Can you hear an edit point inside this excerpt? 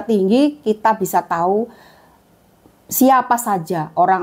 no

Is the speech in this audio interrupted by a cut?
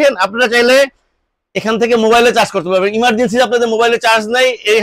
no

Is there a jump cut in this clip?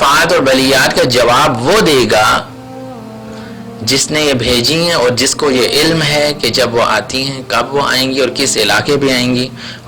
no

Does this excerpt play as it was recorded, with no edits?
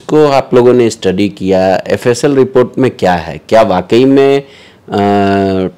yes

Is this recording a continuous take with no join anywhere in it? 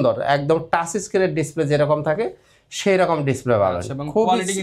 yes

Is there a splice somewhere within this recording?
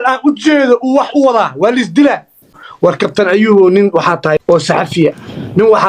yes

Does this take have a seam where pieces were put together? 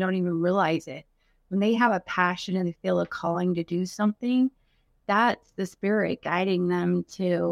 no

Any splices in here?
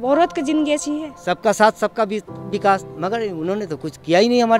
yes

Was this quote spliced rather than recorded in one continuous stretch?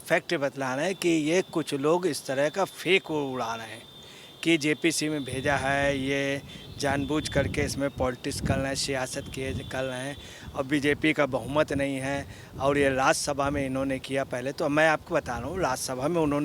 no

